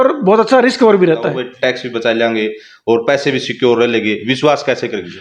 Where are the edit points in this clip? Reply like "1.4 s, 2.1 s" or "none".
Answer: 1.3 s